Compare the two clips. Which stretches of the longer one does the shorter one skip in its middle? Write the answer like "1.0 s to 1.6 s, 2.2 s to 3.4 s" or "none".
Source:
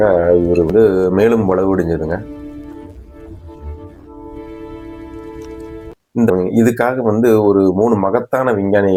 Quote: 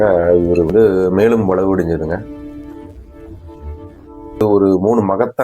4.4 s to 7.4 s